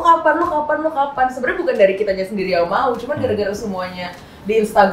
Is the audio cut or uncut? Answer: uncut